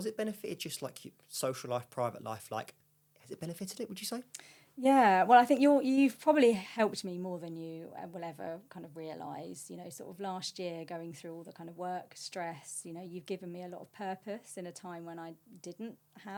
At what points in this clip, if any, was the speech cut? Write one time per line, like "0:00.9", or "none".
none